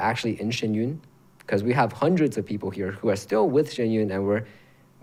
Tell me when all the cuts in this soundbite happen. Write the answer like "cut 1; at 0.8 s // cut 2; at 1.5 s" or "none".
none